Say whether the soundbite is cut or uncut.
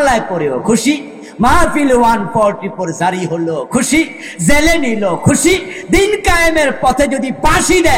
uncut